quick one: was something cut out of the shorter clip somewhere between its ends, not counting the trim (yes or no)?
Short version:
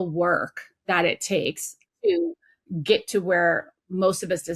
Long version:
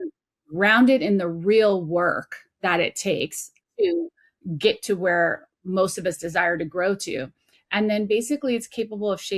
no